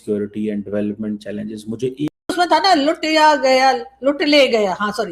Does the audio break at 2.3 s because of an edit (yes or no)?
yes